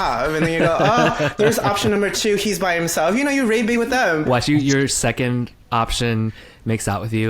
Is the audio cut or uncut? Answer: cut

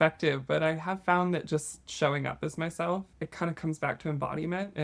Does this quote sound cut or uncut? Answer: cut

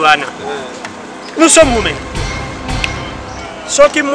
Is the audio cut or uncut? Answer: cut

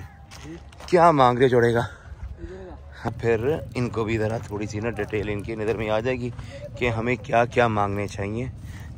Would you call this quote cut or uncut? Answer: cut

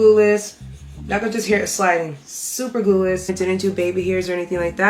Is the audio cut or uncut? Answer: cut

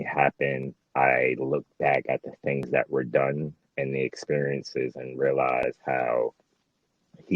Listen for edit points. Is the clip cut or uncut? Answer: uncut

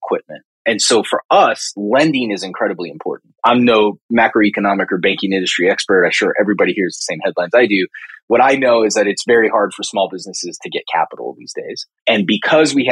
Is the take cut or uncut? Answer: uncut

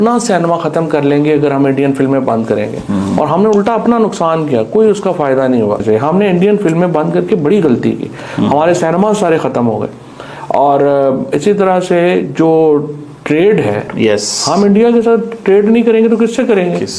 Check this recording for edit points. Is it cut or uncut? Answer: cut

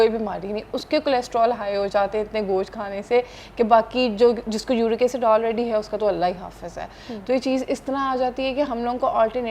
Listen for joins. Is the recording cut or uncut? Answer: uncut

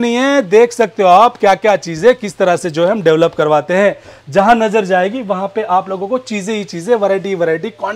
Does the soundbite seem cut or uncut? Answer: uncut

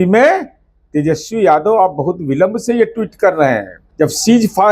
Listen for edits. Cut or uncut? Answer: cut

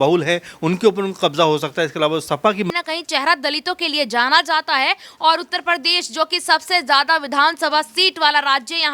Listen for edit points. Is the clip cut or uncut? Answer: cut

